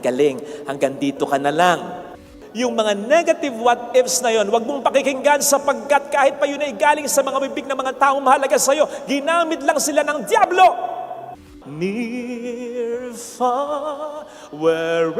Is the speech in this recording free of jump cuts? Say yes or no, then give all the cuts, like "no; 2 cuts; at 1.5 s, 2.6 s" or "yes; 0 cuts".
no; 2 cuts; at 2.1 s, 11.4 s